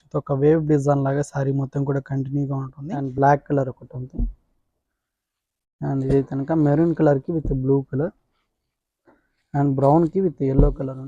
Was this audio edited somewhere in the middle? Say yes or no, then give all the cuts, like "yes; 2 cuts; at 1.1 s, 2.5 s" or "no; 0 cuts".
yes; 1 cut; at 2.7 s